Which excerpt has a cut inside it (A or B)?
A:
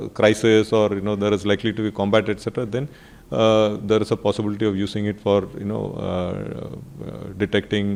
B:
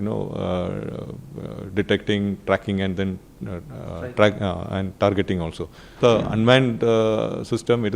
B